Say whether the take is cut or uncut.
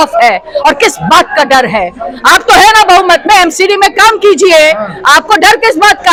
uncut